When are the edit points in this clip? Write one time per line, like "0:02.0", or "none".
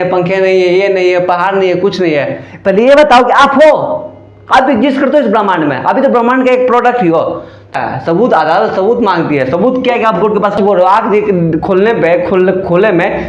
0:07.7
0:10.6